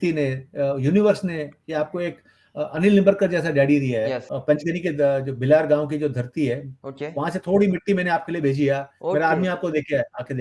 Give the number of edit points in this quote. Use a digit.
1